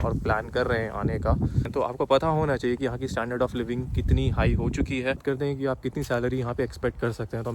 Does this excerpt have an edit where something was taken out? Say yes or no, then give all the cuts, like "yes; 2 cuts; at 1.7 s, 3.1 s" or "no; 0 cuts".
yes; 2 cuts; at 1.7 s, 5.2 s